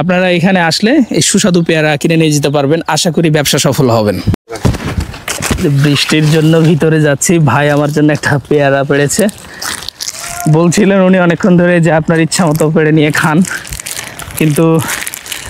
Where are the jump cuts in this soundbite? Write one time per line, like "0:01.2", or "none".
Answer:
none